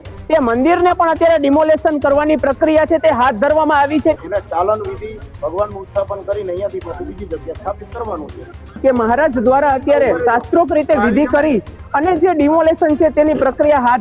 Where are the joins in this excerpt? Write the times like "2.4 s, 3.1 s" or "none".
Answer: 4.2 s, 8.7 s

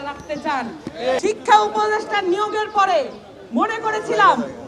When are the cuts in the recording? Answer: 1.2 s

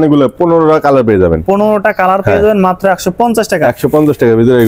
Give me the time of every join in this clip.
none

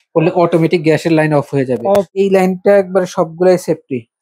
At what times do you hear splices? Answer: 2.1 s

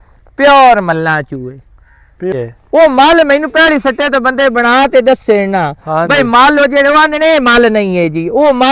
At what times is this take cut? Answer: 2.3 s

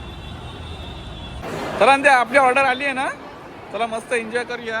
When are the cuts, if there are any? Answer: 1.4 s

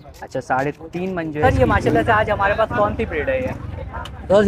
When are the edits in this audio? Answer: 1.4 s

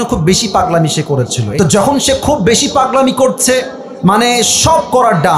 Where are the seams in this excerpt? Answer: 1.4 s

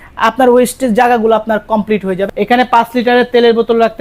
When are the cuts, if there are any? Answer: 2.2 s

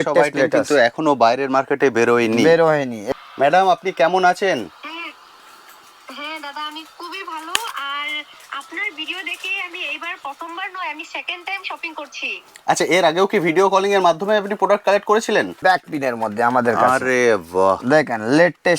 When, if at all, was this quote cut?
3.0 s, 15.6 s

